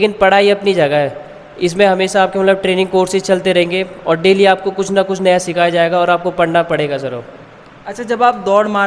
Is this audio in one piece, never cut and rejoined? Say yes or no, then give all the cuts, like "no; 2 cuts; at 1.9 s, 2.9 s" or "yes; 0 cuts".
yes; 0 cuts